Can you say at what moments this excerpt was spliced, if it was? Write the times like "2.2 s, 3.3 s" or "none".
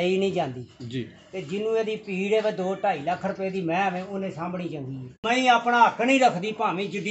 5.2 s